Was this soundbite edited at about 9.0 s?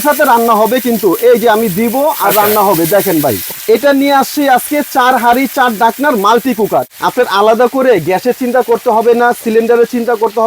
no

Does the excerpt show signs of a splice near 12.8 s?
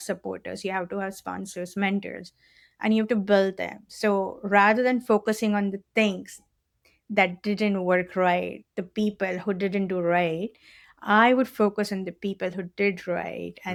no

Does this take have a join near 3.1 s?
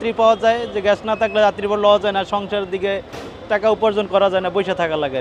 no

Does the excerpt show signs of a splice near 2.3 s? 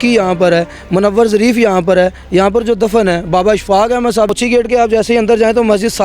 no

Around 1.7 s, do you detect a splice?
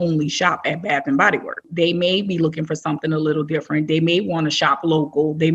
yes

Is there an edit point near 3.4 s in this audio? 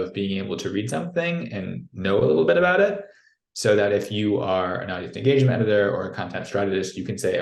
no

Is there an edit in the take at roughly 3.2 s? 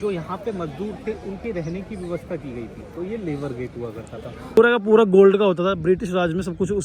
no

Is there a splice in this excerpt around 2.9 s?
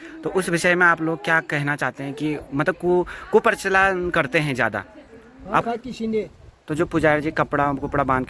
no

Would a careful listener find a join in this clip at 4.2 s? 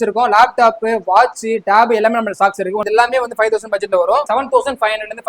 yes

